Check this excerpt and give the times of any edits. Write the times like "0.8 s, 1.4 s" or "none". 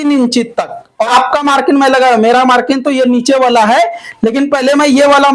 1.1 s